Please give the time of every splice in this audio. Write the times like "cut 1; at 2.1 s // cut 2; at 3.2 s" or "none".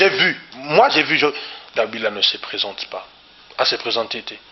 cut 1; at 1.5 s